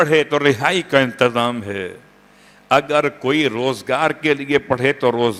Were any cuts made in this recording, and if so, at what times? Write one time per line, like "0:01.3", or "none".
none